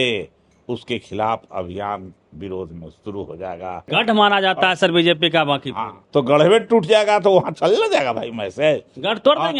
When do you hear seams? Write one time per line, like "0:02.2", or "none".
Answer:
0:03.9
0:06.0